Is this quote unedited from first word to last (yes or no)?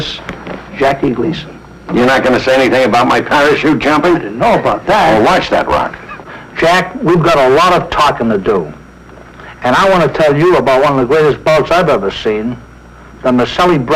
no